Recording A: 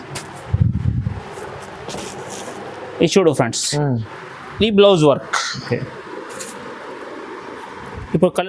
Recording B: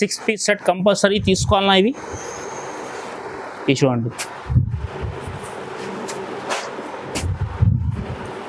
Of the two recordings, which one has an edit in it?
A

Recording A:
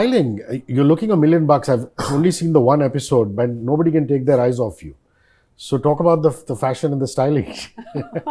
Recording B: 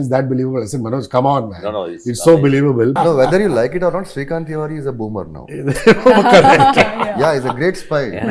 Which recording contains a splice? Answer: B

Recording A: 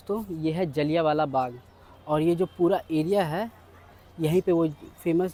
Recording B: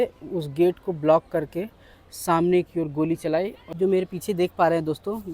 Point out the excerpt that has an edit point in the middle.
B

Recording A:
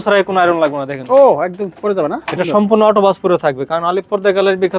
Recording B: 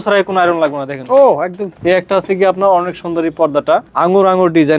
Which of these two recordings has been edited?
B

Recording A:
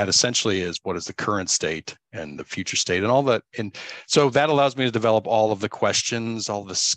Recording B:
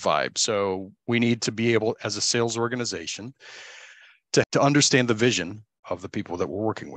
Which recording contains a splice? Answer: B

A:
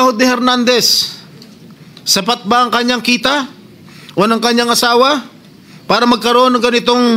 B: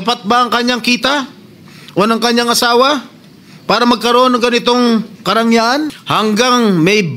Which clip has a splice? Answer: B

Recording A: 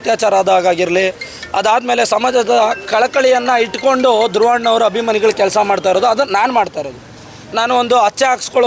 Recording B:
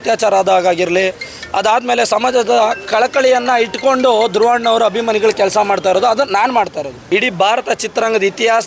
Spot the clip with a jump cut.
B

